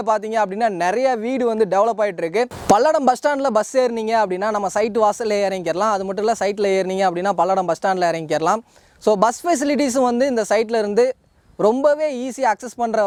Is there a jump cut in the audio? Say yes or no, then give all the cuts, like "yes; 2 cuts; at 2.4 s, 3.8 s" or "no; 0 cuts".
no; 0 cuts